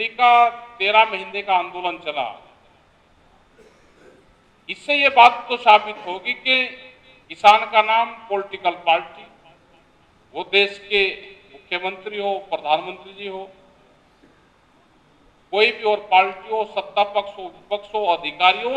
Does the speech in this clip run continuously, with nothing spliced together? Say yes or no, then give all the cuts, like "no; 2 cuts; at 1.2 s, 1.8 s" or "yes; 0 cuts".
yes; 0 cuts